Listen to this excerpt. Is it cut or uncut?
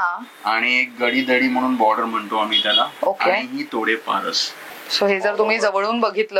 cut